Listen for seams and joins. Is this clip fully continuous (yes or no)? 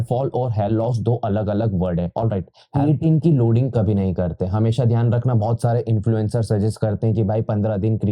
no